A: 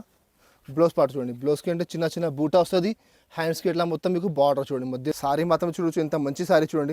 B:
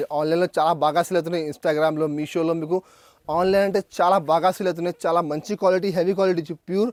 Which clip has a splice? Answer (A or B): A